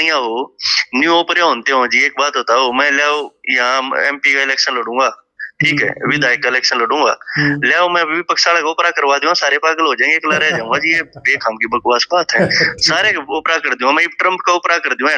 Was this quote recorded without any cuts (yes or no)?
yes